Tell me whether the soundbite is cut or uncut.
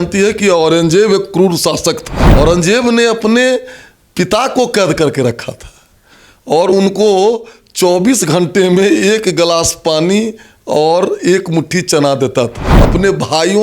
cut